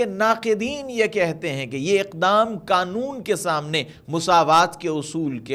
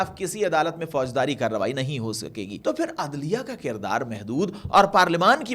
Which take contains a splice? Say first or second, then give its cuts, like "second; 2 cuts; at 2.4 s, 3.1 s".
second; 1 cut; at 2.5 s